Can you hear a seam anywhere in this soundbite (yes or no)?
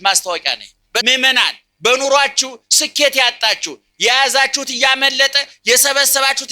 yes